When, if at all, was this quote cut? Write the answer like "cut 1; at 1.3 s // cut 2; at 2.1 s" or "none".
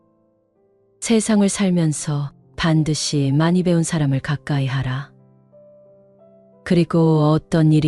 none

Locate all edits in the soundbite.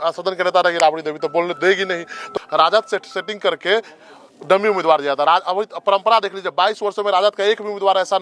cut 1; at 2.3 s

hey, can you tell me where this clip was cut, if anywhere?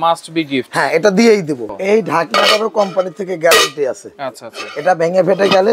cut 1; at 1.7 s

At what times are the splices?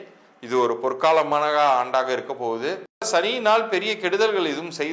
cut 1; at 3.1 s

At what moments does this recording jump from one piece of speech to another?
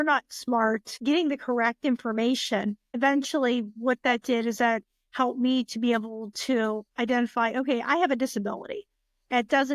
cut 1; at 0.9 s // cut 2; at 2.9 s

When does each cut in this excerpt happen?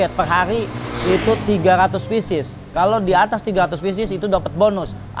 none

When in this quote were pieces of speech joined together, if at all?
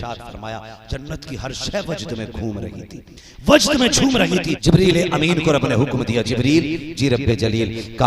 cut 1; at 4.5 s

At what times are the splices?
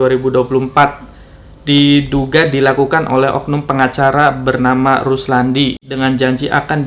cut 1; at 5.8 s

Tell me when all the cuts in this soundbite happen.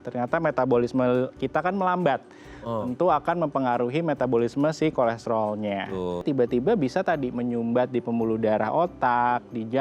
cut 1; at 6.2 s

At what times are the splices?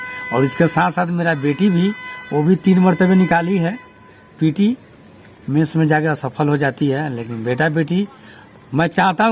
none

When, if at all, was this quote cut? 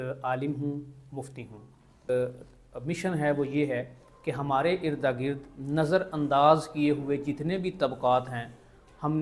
cut 1; at 2.1 s

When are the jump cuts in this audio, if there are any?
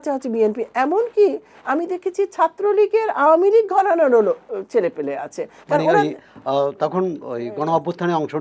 none

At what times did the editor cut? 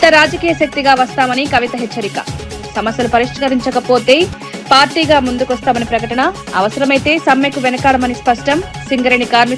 none

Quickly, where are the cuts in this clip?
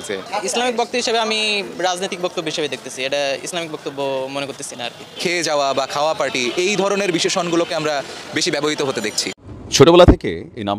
cut 1; at 9.2 s

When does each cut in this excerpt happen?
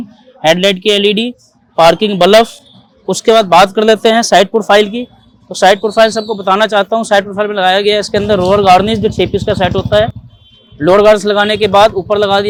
none

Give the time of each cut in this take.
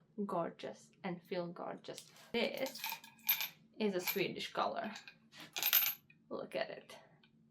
cut 1; at 2.3 s

